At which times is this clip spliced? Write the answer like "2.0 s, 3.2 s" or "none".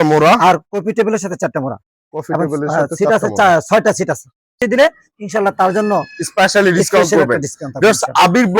4.6 s